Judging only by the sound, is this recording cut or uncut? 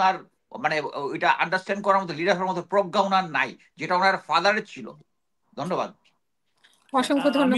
uncut